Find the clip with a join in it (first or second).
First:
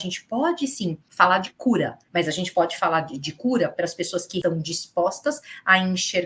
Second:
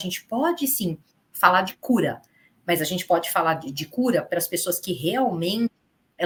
first